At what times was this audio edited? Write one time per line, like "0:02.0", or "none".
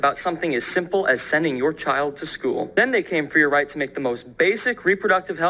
0:02.7